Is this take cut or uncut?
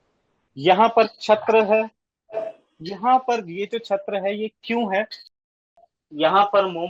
cut